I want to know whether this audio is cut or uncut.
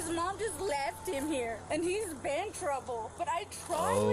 cut